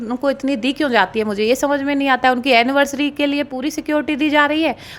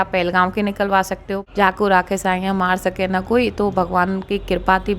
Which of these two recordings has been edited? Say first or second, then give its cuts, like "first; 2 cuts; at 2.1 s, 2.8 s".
second; 1 cut; at 1.4 s